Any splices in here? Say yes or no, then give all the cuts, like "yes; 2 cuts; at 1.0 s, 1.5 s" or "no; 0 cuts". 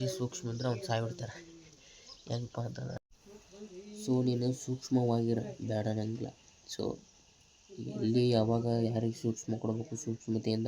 yes; 1 cut; at 3.2 s